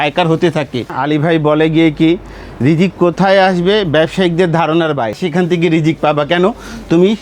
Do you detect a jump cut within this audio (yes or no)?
yes